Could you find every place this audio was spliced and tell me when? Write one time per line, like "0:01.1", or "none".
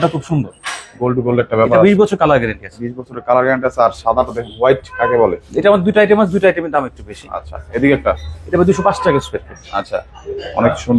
none